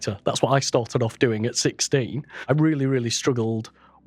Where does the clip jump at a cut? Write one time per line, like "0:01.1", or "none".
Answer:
0:02.5